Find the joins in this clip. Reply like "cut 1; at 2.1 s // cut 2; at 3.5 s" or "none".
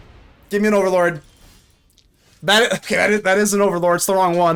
none